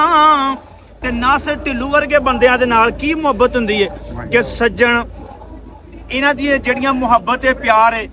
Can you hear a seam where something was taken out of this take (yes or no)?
yes